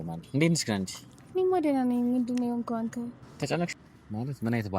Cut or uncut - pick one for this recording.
cut